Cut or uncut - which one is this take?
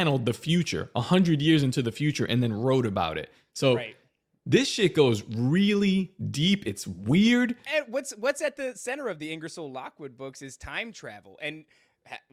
uncut